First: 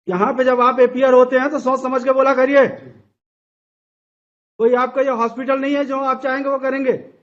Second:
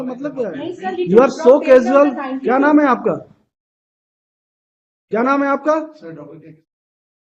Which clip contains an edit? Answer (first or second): second